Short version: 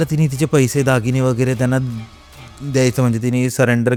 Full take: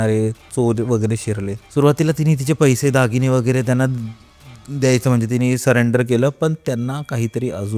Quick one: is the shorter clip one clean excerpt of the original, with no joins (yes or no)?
yes